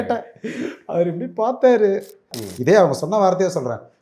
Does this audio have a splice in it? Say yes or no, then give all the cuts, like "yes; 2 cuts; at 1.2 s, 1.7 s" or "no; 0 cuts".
yes; 1 cut; at 2.2 s